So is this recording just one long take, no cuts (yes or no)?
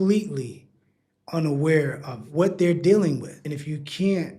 no